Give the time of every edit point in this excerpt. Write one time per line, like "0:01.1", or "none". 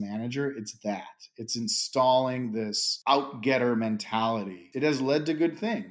0:02.8
0:04.6